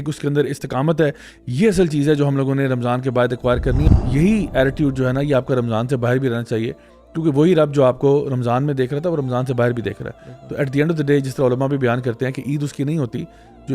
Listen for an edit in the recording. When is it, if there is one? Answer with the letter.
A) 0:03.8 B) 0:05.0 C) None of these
A